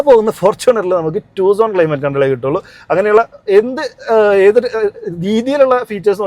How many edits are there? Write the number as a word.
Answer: zero